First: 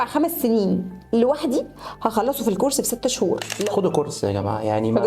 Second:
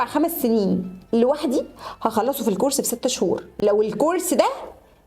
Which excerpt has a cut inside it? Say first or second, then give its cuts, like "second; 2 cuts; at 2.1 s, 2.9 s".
first; 1 cut; at 3.6 s